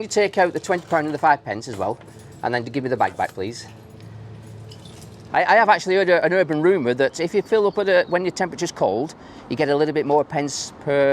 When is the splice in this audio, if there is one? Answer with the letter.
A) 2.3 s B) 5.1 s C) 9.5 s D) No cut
B